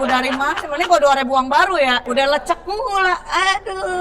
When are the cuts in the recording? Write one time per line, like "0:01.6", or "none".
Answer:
0:02.0